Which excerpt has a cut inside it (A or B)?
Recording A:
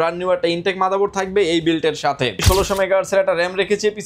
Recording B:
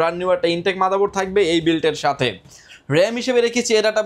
A